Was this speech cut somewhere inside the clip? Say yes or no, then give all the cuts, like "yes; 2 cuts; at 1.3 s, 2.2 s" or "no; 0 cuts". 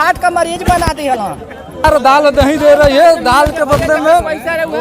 yes; 1 cut; at 1.8 s